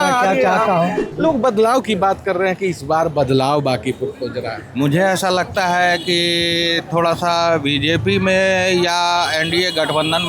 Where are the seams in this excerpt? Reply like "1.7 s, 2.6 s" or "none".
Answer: 1.0 s

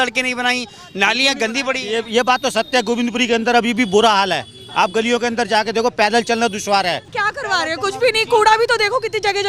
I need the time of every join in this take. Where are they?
7.1 s

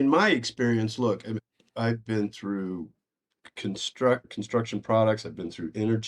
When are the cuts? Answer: 1.4 s, 4.2 s

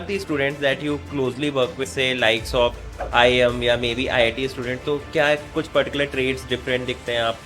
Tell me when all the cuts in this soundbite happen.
1.9 s

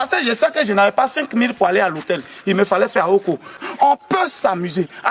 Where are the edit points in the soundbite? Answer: 3.6 s

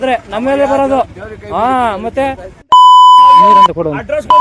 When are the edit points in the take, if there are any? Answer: 2.6 s

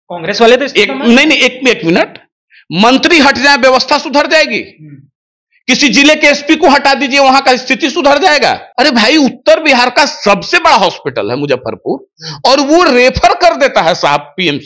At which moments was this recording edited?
8.6 s

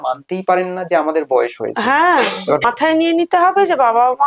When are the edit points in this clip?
2.6 s

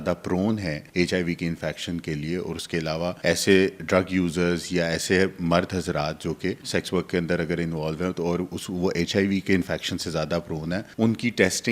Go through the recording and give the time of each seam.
0.8 s, 3.2 s, 6.6 s, 10.9 s

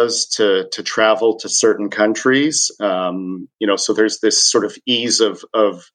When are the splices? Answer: none

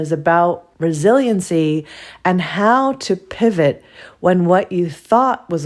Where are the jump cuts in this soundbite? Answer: none

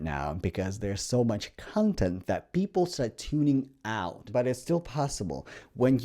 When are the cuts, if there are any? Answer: 4.2 s

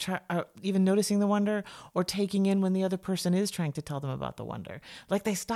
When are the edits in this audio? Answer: none

